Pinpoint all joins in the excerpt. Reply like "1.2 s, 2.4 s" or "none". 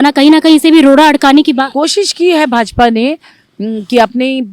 1.7 s